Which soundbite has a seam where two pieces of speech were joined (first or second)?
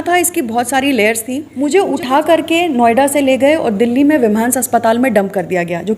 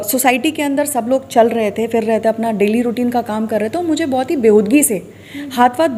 first